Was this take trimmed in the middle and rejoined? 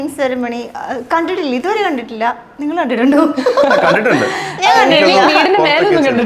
no; 0 cuts

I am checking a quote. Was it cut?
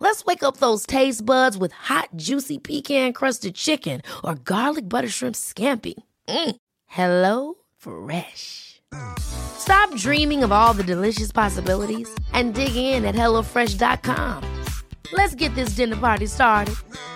no; 0 cuts

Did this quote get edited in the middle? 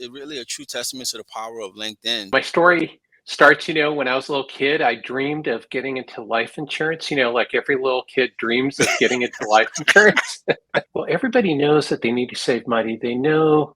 yes; 2 cuts; at 2.3 s, 10.9 s

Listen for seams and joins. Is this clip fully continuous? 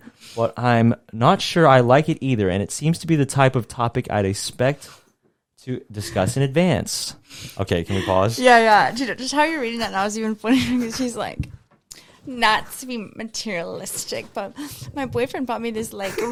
yes; 0 cuts

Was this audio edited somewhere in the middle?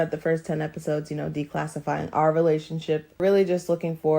yes; 1 cut; at 3.2 s

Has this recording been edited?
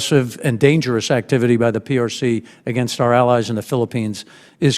no; 0 cuts

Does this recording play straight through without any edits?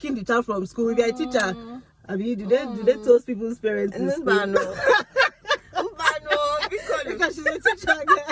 yes; 0 cuts

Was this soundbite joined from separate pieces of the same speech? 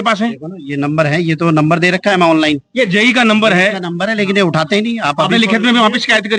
no; 0 cuts

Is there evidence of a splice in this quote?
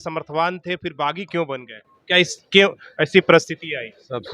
no; 0 cuts

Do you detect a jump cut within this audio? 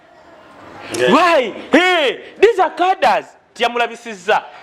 yes; 1 cut; at 3.4 s

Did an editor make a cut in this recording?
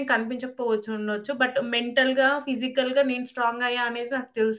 no; 0 cuts

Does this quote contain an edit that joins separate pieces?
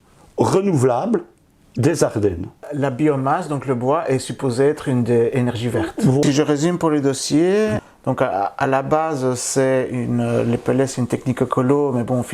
yes; 3 cuts; at 2.7 s, 6.2 s, 7.9 s

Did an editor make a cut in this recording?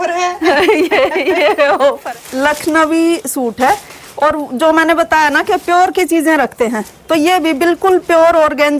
yes; 1 cut; at 2.0 s

